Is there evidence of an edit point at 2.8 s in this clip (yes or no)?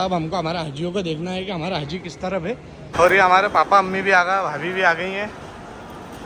yes